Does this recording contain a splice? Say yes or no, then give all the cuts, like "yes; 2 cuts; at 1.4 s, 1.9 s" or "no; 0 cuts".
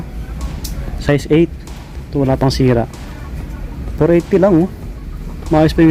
no; 0 cuts